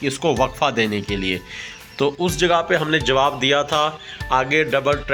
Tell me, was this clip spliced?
no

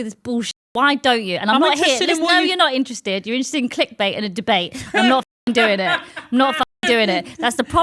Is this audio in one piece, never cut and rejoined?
yes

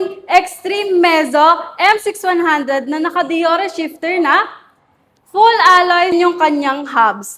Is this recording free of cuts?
no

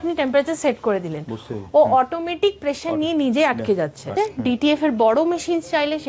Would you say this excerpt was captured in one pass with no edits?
no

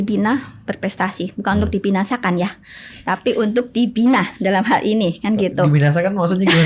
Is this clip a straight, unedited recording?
yes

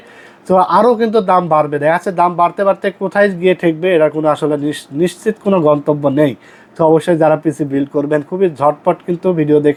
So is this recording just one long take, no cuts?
yes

